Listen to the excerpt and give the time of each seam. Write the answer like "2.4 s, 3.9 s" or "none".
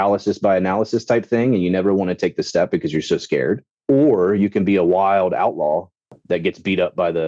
3.7 s, 6.1 s